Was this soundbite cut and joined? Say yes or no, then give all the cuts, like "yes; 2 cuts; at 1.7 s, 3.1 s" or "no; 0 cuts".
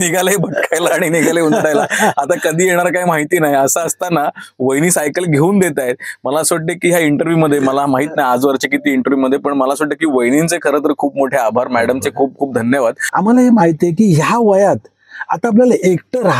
no; 0 cuts